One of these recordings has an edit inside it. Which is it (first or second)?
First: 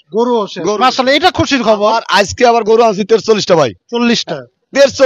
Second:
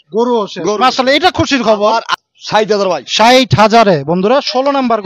second